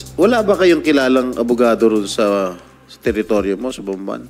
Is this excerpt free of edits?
yes; 0 cuts

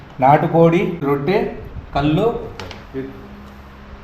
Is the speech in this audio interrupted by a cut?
yes; 1 cut; at 1.0 s

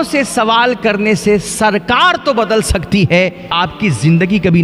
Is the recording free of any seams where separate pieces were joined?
no; 1 cut; at 3.4 s

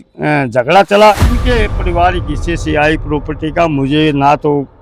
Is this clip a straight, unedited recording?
no; 1 cut; at 1.3 s

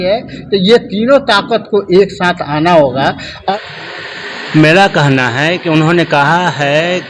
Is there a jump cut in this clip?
yes; 1 cut; at 3.3 s

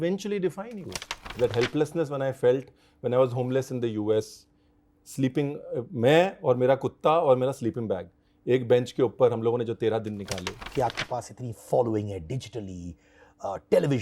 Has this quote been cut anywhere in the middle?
yes; 2 cuts; at 1.3 s, 10.6 s

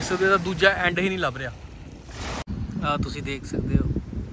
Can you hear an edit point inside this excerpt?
yes; 1 cut; at 2.4 s

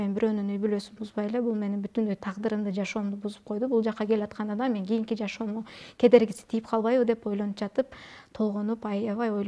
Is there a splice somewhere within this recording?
no; 0 cuts

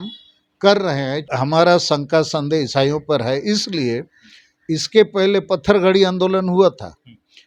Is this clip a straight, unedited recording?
no; 1 cut; at 1.2 s

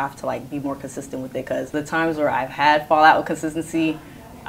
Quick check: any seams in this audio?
yes; 1 cut; at 1.7 s

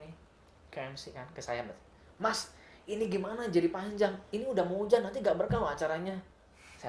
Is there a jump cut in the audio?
no; 0 cuts

